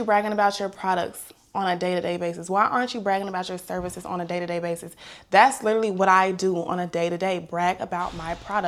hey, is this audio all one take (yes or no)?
yes